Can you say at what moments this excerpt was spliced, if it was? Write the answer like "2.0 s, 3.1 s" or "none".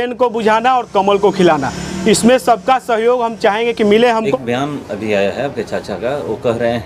4.3 s